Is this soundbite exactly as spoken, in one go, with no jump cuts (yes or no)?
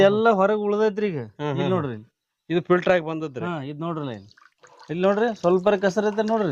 yes